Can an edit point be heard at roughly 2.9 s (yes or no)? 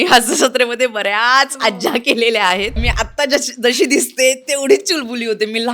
yes